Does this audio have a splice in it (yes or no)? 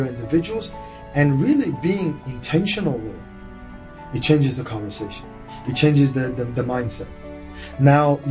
yes